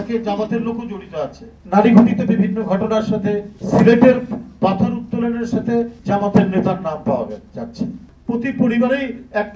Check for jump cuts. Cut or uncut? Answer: cut